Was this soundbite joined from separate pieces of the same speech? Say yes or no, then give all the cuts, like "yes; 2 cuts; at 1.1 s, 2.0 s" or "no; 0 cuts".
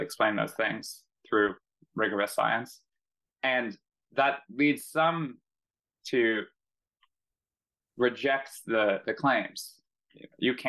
no; 0 cuts